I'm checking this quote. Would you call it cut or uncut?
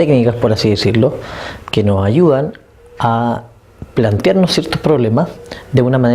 cut